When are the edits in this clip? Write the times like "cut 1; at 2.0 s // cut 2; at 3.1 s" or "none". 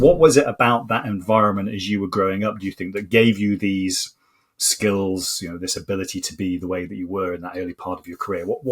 none